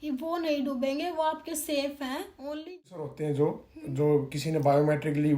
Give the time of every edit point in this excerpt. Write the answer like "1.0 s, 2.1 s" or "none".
2.9 s